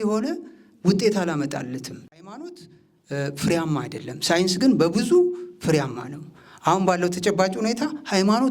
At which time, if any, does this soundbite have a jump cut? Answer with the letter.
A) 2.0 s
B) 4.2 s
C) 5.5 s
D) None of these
A